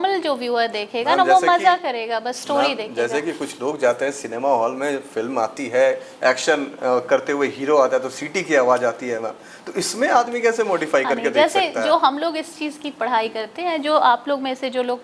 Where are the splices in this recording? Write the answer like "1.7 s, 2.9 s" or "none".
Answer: none